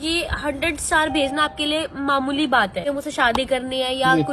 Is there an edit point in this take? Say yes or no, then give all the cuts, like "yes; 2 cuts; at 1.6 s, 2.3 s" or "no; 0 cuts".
yes; 1 cut; at 2.9 s